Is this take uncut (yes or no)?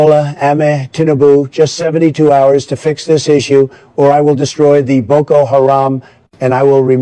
yes